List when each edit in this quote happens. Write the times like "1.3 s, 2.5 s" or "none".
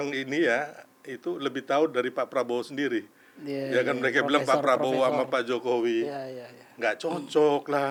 none